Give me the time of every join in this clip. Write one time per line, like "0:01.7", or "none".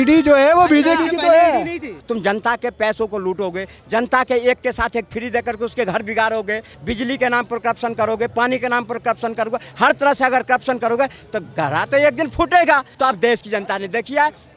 0:01.9
0:06.7
0:12.9